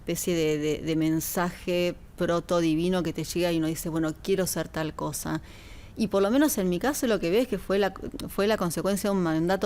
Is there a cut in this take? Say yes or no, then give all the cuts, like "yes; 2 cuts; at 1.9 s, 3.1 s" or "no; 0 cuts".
no; 0 cuts